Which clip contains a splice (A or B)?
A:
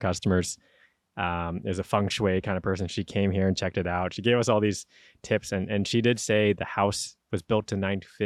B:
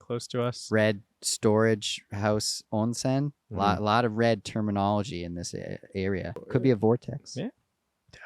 B